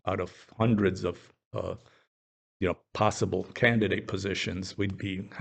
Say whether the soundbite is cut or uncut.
uncut